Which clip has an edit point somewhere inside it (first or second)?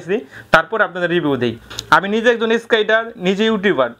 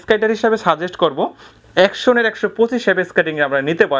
first